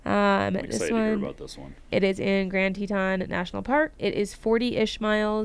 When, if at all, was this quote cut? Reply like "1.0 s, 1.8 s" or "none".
1.9 s, 4.0 s